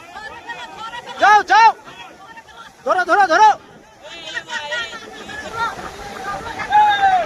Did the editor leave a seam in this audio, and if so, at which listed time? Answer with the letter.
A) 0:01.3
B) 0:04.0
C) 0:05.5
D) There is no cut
C